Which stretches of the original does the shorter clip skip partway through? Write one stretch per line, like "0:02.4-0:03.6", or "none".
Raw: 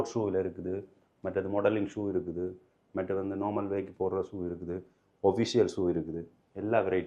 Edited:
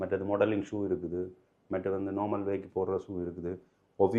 none